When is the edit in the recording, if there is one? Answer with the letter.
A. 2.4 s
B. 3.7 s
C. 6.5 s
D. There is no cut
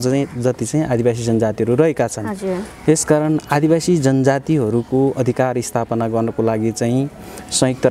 D